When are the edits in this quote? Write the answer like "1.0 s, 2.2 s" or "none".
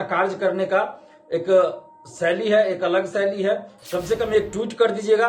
3.8 s